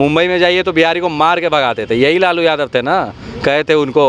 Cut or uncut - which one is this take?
uncut